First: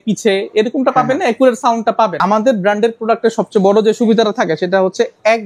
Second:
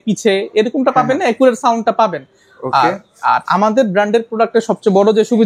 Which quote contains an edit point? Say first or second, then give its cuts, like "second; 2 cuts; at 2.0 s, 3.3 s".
first; 1 cut; at 2.2 s